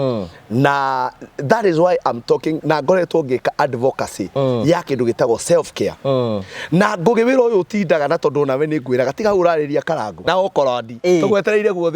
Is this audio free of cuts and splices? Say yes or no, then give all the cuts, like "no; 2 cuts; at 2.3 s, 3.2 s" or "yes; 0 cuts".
yes; 0 cuts